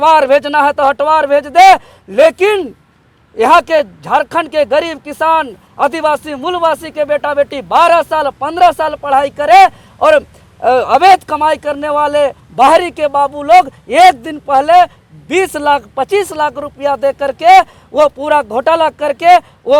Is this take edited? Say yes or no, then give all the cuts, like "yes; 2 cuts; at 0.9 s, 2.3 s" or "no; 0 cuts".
no; 0 cuts